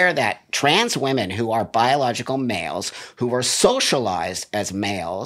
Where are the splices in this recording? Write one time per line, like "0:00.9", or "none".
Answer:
none